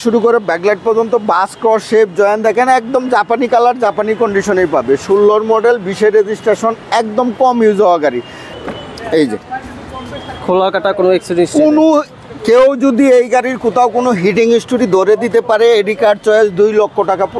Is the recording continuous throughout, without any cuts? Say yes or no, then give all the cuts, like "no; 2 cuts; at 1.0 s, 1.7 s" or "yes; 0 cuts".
no; 1 cut; at 8.4 s